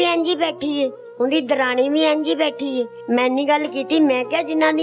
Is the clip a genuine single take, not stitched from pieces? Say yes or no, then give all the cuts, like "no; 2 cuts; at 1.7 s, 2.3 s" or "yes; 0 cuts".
no; 1 cut; at 3.0 s